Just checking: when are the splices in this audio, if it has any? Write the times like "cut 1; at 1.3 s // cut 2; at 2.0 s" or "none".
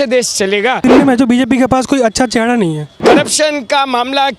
cut 1; at 0.8 s // cut 2; at 2.9 s